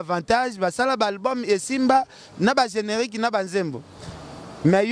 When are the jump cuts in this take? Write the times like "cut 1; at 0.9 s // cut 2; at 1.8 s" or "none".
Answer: none